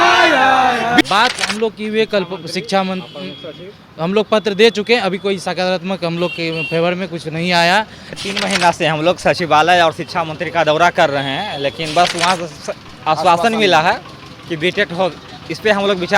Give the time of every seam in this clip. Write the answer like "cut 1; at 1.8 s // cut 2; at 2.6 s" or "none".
cut 1; at 1.0 s // cut 2; at 8.2 s